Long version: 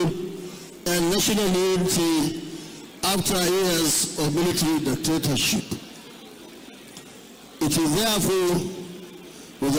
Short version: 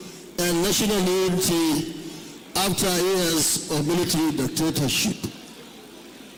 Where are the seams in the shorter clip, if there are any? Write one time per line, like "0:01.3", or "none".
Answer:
none